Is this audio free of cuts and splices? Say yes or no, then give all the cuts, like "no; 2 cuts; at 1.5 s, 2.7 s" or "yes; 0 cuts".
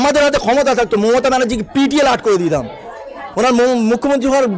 yes; 0 cuts